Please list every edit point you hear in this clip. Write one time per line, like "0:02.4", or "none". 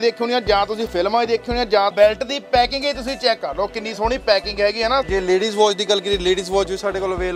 0:01.9
0:05.0